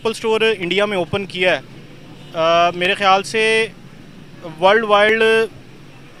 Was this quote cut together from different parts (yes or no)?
no